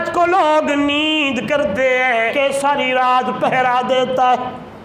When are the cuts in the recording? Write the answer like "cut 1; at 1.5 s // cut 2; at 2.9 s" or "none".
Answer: cut 1; at 2.3 s